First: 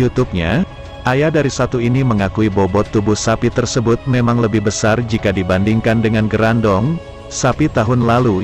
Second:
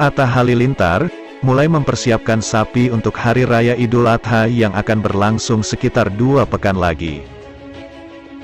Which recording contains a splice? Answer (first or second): second